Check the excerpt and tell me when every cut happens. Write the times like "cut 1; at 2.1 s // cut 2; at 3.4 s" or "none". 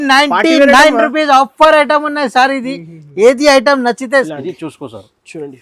cut 1; at 4.3 s